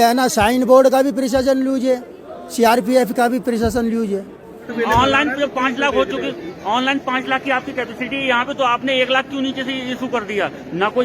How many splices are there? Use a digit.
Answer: 1